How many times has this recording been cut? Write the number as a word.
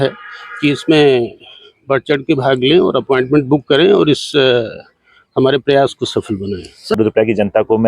one